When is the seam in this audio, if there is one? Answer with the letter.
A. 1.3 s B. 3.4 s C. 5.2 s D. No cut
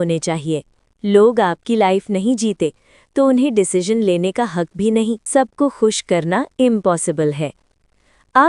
C